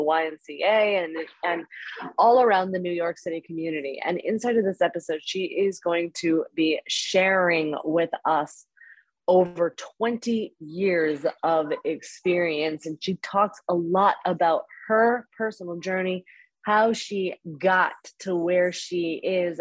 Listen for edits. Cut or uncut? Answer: uncut